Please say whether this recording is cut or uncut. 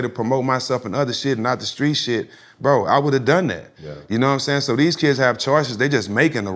uncut